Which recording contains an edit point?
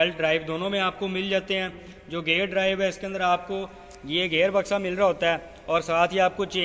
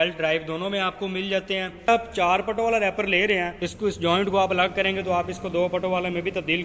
second; 2 cuts; at 1.9 s, 3.6 s

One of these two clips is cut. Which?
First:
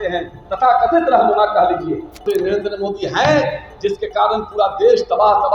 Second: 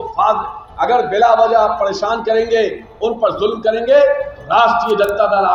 first; 1 cut; at 2.2 s

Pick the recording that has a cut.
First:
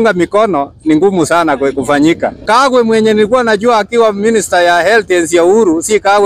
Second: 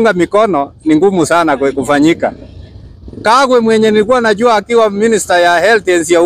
first; 1 cut; at 2.4 s

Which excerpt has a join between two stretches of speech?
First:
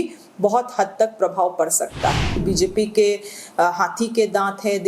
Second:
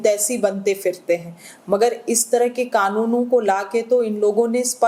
first; 1 cut; at 2.4 s

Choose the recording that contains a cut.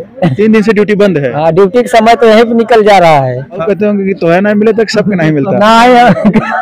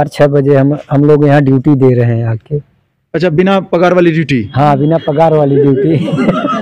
first; 1 cut; at 3.6 s

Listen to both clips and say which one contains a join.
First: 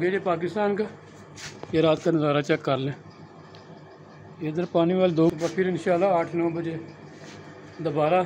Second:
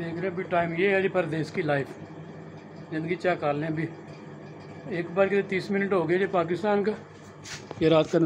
first; 1 cut; at 5.3 s

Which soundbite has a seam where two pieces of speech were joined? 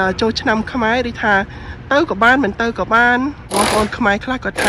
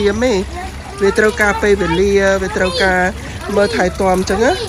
first; 1 cut; at 3.5 s

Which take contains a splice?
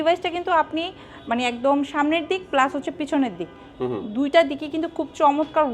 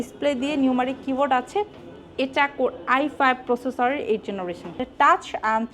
second; 1 cut; at 4.9 s

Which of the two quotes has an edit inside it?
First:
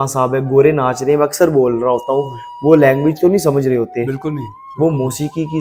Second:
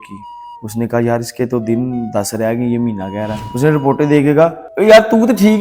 second; 1 cut; at 3.4 s

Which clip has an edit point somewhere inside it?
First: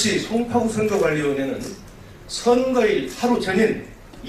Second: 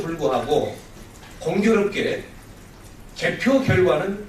second; 1 cut; at 1.7 s

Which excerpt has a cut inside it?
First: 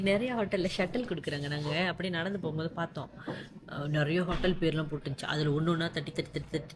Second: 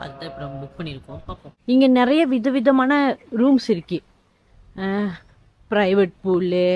second; 1 cut; at 1.5 s

